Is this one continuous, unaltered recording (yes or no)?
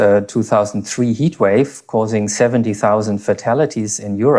yes